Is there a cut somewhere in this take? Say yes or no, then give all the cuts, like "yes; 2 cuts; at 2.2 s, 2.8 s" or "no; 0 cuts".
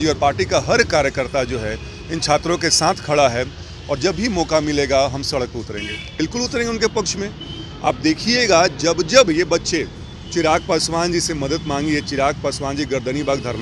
yes; 1 cut; at 6.0 s